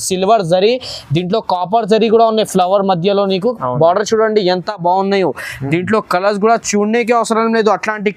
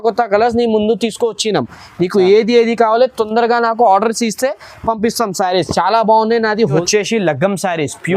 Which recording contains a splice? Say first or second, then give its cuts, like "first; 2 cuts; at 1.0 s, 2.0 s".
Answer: second; 1 cut; at 6.8 s